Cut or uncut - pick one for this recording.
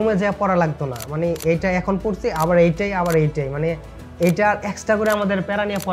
uncut